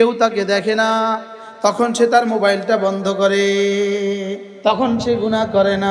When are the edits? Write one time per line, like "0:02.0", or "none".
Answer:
0:04.5